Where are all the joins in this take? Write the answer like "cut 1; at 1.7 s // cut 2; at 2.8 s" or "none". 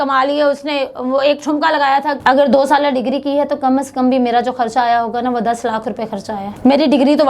cut 1; at 2.1 s // cut 2; at 6.5 s